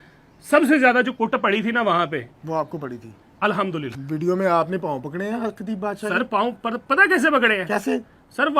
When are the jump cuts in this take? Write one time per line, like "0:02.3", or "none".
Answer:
0:03.9